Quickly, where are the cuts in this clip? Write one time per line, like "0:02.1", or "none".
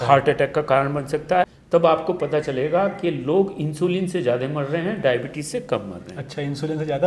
0:01.5